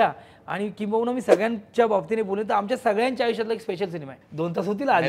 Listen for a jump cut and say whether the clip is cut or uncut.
cut